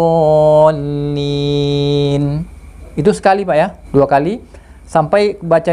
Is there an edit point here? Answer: yes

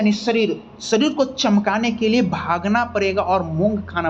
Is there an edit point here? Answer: no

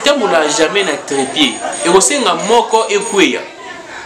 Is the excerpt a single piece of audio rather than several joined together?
yes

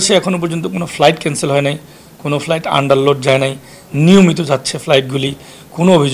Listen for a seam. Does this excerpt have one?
no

